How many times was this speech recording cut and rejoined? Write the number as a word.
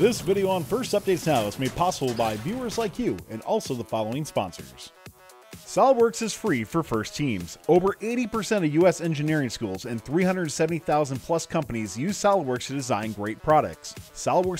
one